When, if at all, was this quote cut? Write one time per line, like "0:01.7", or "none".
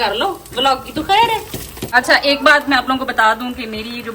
0:01.8